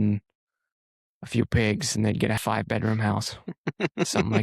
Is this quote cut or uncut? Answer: cut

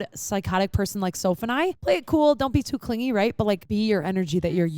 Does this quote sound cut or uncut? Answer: cut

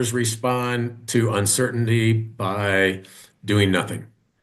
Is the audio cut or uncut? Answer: uncut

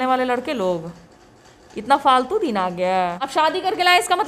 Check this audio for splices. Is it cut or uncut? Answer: cut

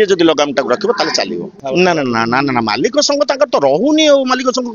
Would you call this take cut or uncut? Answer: cut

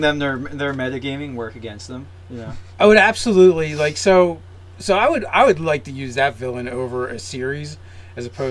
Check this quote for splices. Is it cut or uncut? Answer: uncut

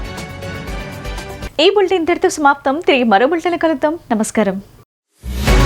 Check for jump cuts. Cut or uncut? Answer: uncut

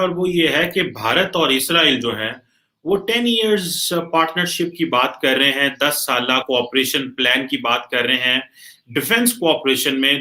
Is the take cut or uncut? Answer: uncut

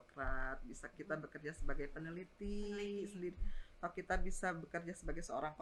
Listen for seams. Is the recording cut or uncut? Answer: uncut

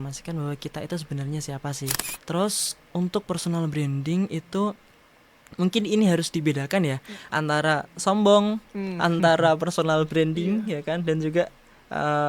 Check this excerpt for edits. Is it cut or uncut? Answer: cut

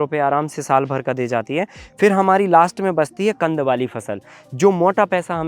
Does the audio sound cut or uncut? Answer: uncut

